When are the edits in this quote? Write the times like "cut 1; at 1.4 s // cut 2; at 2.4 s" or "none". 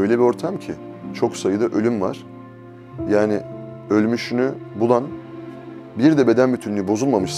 cut 1; at 1.0 s